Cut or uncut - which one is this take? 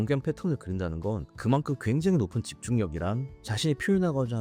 uncut